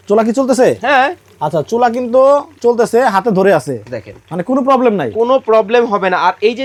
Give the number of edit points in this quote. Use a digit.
0